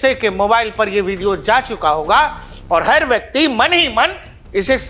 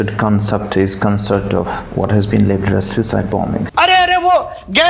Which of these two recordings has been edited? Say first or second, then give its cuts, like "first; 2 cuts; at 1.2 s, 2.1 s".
second; 2 cuts; at 1.8 s, 3.7 s